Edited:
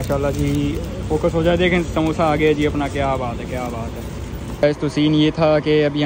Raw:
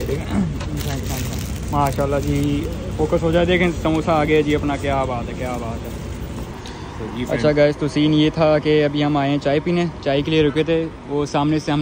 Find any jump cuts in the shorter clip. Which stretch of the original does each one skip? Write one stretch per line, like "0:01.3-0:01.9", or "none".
0:06.5-0:07.6

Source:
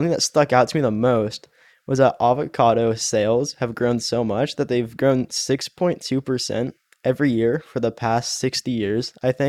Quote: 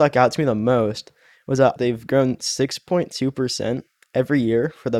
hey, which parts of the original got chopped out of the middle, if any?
0:01.9-0:04.4

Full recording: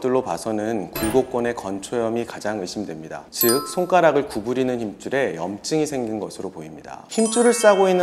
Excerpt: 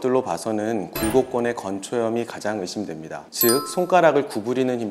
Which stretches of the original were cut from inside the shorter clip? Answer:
none

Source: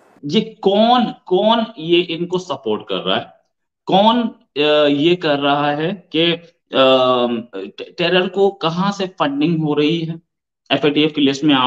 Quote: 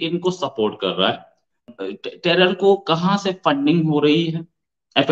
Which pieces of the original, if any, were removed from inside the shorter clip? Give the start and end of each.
0:03.8-0:07.4

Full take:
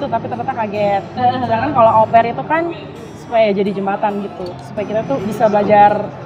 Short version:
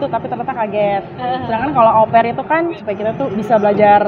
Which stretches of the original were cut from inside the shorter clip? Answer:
0:02.8-0:04.7

